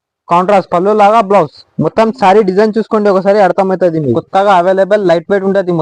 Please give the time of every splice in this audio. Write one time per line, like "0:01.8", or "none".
0:04.2